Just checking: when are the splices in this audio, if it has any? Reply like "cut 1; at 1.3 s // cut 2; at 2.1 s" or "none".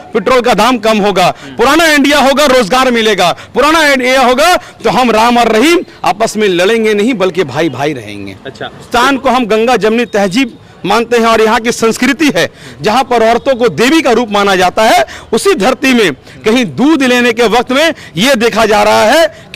cut 1; at 8.9 s